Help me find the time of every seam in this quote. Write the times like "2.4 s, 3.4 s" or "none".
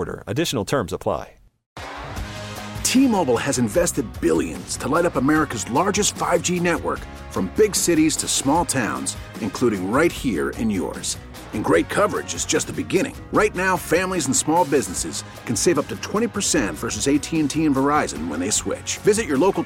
1.7 s